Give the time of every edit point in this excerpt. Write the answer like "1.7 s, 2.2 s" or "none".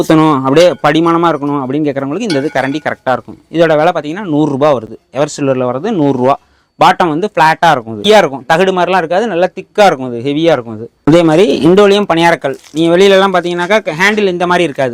none